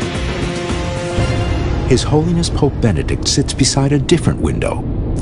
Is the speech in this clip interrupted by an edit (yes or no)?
yes